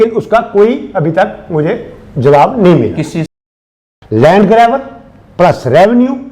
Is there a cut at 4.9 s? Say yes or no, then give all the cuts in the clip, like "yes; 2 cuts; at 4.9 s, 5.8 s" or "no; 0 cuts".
no; 1 cut; at 3.4 s